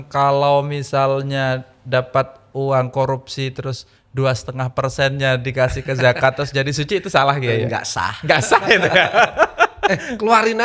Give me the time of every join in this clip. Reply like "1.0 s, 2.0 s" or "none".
none